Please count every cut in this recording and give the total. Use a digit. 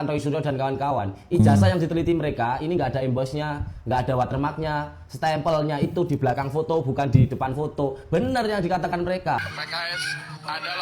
1